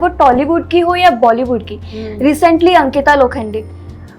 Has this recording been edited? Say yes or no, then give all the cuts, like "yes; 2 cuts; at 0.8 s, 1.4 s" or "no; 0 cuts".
no; 0 cuts